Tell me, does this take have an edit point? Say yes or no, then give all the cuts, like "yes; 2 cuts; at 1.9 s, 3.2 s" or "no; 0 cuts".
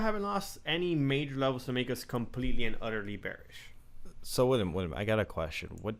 no; 0 cuts